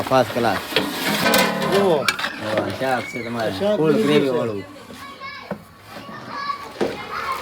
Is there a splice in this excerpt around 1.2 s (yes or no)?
yes